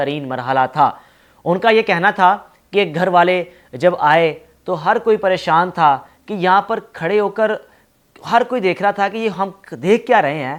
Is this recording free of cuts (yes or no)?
yes